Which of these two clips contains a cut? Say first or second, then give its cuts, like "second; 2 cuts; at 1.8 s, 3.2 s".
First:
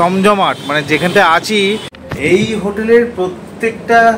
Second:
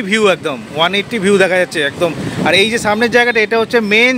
first; 1 cut; at 1.9 s